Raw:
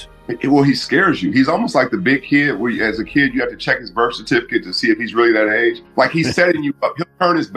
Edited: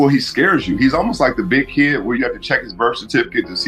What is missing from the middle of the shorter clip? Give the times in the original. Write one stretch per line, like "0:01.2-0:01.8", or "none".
0:02.7-0:03.3